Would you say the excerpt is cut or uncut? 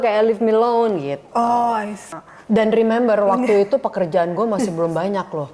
cut